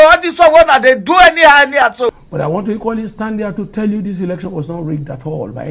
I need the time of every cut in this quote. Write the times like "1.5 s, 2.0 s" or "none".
2.2 s